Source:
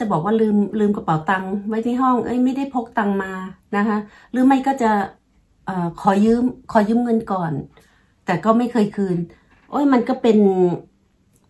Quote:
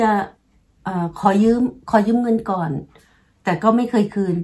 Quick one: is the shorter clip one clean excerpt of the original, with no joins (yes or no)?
yes